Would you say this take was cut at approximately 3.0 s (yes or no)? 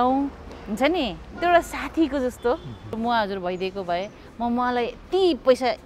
yes